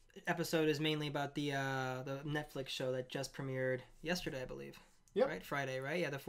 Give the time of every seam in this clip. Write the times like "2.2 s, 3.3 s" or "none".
none